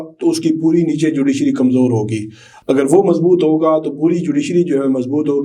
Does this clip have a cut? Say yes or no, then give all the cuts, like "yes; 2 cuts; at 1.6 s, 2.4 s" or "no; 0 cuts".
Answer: no; 0 cuts